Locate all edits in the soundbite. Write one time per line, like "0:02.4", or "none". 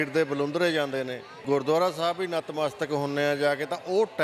0:01.3